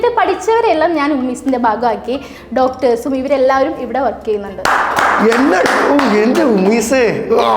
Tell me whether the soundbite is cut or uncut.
cut